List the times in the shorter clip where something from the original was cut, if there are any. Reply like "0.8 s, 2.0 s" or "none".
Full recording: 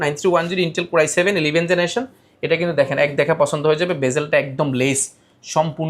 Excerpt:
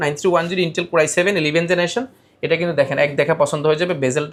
none